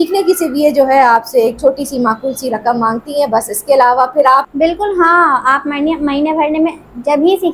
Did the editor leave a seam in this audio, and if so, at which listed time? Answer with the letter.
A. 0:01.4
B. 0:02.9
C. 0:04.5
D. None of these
C